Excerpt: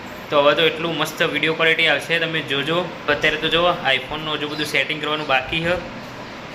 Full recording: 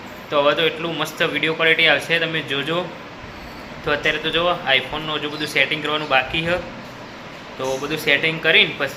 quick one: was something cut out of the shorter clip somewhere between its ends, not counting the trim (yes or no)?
yes